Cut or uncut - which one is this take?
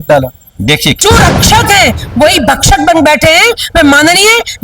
cut